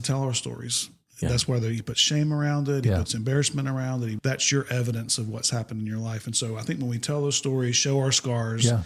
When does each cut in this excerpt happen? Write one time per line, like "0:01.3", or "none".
0:04.2